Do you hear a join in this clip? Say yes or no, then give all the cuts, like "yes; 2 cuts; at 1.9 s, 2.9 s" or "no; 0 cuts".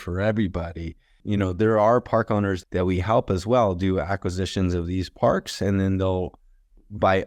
yes; 2 cuts; at 1.2 s, 2.6 s